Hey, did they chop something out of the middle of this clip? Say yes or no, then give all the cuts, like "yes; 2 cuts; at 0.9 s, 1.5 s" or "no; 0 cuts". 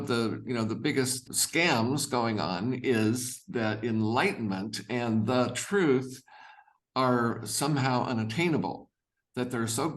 yes; 1 cut; at 1.2 s